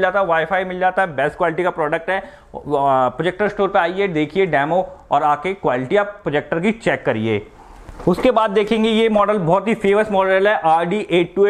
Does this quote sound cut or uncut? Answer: uncut